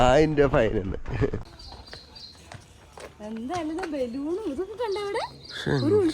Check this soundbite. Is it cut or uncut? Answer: cut